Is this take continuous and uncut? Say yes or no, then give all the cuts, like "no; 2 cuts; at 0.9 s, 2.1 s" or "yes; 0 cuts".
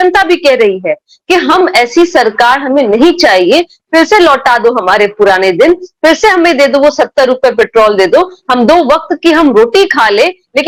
yes; 0 cuts